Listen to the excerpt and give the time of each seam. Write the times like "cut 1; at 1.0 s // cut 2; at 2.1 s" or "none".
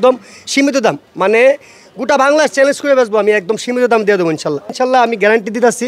cut 1; at 4.7 s